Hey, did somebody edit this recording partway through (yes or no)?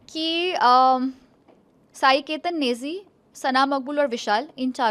no